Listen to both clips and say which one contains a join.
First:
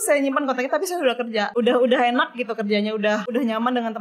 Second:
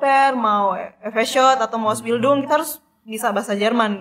first; 2 cuts; at 1.5 s, 3.3 s

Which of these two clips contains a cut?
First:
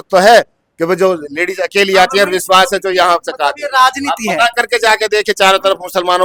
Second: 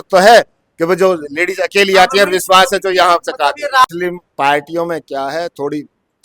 second; 1 cut; at 3.8 s

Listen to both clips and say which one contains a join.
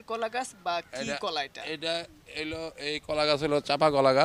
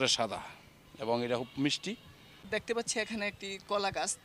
second; 1 cut; at 2.6 s

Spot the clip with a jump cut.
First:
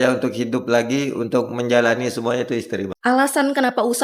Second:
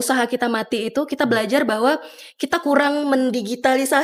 first; 1 cut; at 2.9 s

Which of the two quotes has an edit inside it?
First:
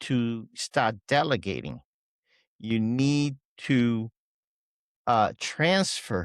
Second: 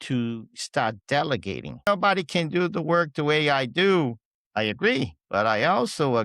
second; 2 cuts; at 1.9 s, 5.2 s

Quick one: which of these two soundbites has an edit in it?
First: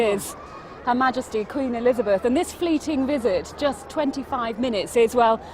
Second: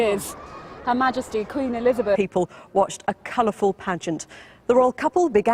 first; 1 cut; at 2.2 s

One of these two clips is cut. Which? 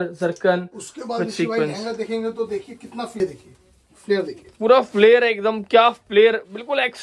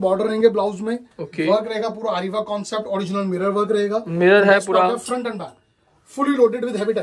first; 1 cut; at 3.2 s

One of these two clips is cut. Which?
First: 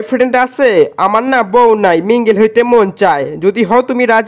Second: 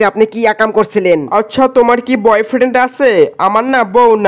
second; 1 cut; at 1.3 s

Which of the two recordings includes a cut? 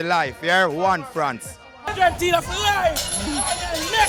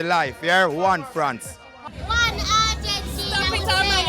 second; 1 cut; at 1.9 s

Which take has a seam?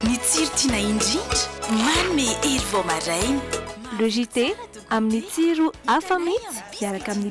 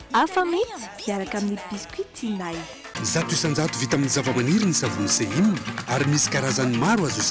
second; 1 cut; at 3.0 s

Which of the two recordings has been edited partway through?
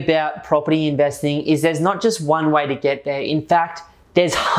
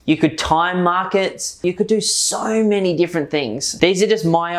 second; 2 cuts; at 1.6 s, 3.6 s

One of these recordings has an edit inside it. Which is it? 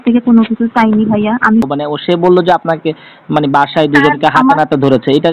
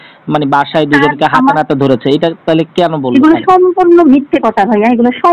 first; 1 cut; at 1.7 s

